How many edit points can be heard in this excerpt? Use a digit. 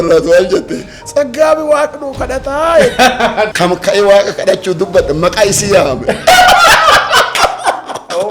1